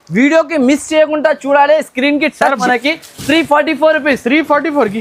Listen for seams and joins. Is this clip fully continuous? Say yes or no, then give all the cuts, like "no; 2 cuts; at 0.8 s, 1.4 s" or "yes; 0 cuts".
no; 1 cut; at 2.6 s